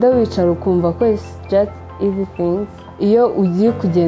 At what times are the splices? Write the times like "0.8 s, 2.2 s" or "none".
1.3 s, 2.8 s